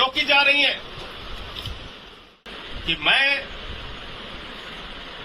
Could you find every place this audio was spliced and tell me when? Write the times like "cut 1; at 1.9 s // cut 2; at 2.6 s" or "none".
cut 1; at 2.3 s